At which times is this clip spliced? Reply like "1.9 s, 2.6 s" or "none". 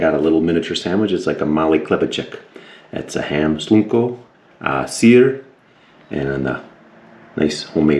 none